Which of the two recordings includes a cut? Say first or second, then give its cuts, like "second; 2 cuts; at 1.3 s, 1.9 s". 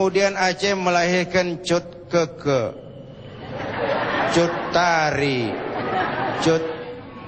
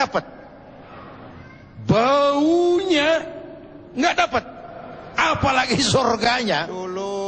second; 1 cut; at 6.2 s